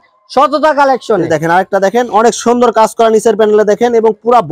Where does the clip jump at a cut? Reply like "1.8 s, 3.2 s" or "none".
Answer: none